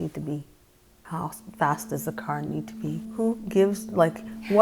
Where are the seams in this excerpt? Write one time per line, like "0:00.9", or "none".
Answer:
none